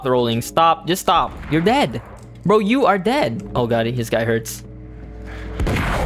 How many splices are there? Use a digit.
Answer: 1